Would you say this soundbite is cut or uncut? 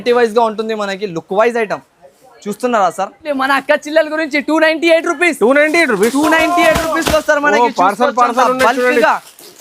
cut